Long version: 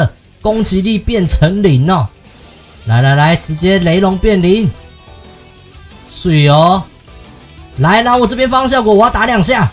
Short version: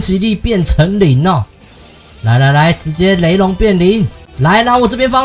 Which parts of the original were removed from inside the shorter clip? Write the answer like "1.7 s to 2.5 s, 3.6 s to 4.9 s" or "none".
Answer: 4.9 s to 7.6 s